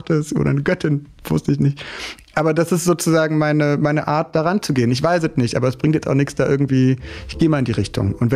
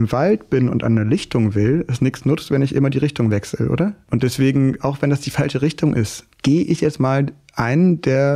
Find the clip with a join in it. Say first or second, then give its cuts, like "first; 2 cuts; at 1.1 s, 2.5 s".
second; 2 cuts; at 4.0 s, 6.2 s